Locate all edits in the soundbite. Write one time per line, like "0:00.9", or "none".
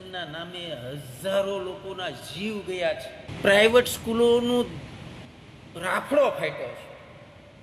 0:03.2

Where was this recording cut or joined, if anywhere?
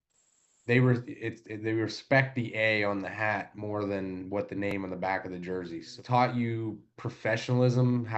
0:06.0

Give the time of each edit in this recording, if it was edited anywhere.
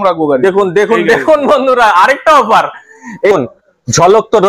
0:03.3

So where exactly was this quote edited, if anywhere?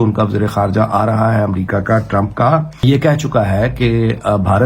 0:02.8

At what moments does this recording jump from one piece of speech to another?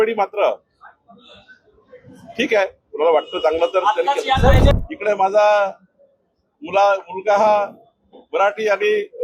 0:04.7

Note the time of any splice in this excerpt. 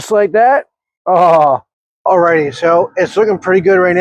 0:01.9

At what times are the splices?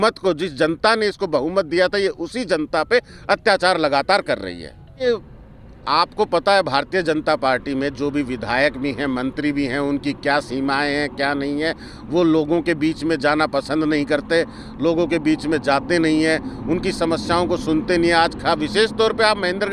0:05.0

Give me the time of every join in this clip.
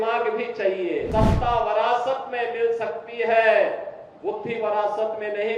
0:01.1

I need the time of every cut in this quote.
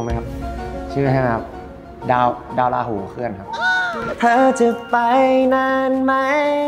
0:04.1

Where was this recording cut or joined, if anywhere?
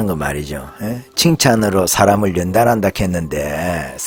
none

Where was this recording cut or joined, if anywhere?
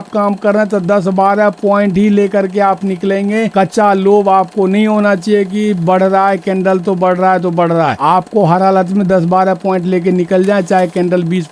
none

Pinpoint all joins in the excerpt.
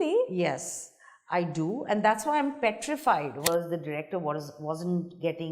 0:03.5

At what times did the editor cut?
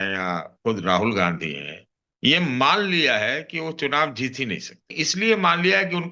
0:05.0

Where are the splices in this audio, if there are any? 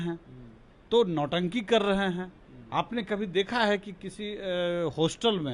none

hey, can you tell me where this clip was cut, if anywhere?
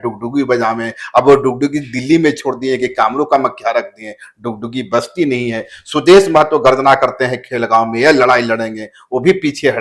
none

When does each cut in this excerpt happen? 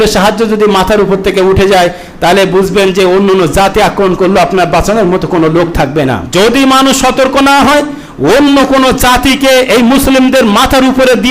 0:06.2

